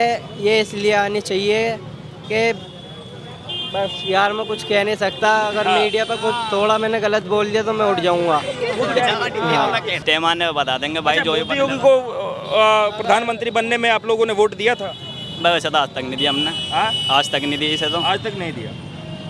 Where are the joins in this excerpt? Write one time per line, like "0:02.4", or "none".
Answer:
0:09.9